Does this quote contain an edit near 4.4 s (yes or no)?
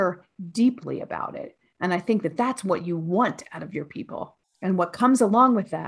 yes